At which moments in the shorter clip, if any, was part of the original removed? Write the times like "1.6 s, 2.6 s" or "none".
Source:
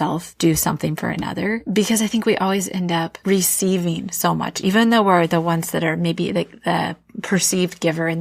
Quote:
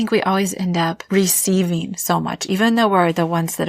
none